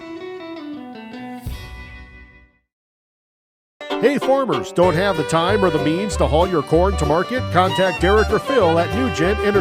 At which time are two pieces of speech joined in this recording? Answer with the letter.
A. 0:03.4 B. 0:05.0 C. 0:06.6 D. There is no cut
B